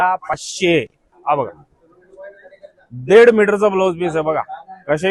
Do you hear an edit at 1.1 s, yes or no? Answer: yes